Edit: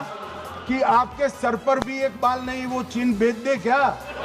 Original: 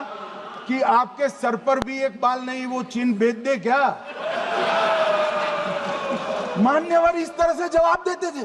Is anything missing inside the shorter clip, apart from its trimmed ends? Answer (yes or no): no